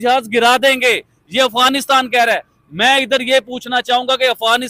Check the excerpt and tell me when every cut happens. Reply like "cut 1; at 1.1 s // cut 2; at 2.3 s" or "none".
none